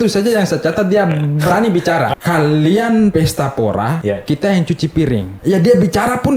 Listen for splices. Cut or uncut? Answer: cut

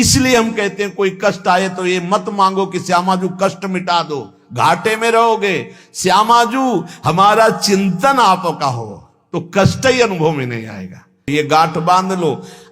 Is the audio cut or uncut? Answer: cut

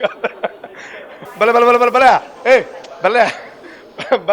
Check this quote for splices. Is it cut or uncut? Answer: cut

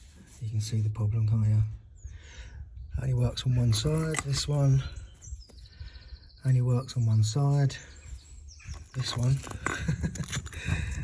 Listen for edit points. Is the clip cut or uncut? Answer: cut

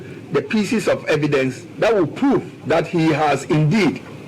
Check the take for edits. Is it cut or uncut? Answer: cut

